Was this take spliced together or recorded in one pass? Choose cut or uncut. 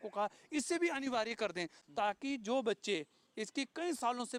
uncut